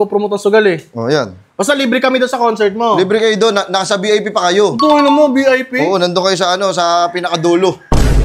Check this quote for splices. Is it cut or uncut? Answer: uncut